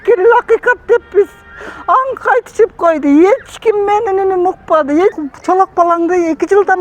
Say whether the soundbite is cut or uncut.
cut